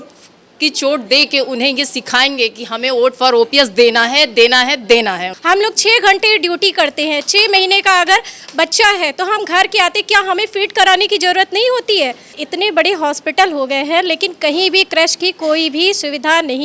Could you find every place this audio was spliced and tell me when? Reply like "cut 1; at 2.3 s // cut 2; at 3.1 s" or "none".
cut 1; at 5.3 s // cut 2; at 12.4 s